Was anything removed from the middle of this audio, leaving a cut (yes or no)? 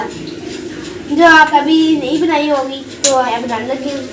yes